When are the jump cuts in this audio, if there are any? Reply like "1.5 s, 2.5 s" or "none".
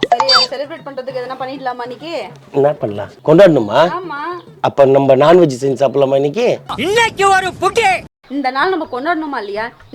3.1 s, 8.2 s